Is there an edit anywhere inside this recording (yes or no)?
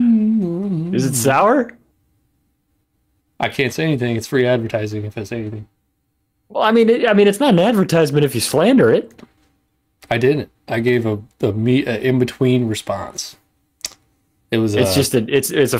no